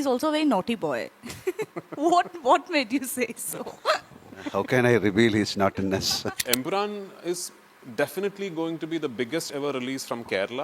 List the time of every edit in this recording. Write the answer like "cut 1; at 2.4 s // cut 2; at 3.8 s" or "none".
cut 1; at 6.4 s